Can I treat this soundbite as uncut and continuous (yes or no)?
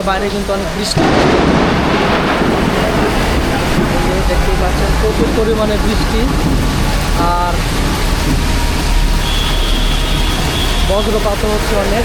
yes